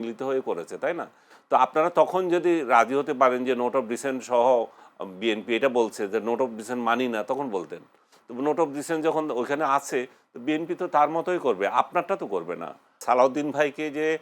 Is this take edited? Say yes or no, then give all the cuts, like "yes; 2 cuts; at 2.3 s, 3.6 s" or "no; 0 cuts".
yes; 1 cut; at 13.0 s